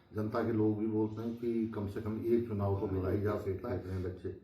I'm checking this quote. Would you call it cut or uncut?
cut